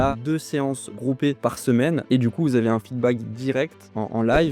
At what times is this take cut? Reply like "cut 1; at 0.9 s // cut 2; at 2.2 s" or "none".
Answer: cut 1; at 2.0 s